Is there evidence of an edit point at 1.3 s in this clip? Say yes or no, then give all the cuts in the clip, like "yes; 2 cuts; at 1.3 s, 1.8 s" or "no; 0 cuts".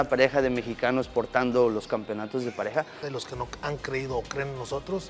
no; 1 cut; at 3.0 s